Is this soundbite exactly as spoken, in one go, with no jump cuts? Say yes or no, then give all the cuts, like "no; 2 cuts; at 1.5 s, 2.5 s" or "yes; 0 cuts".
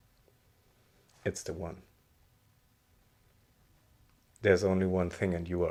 yes; 0 cuts